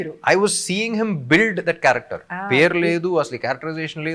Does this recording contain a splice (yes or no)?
no